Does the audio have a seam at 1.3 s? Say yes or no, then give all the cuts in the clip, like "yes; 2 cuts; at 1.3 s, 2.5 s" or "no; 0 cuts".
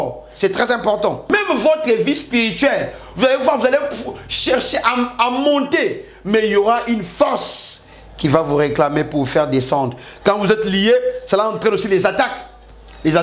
yes; 1 cut; at 1.3 s